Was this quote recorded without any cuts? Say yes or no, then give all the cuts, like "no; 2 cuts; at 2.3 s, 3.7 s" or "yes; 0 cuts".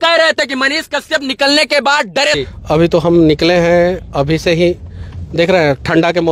no; 1 cut; at 2.4 s